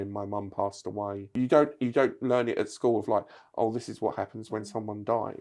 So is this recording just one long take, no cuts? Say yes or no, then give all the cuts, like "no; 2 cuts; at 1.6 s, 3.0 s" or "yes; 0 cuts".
no; 1 cut; at 1.3 s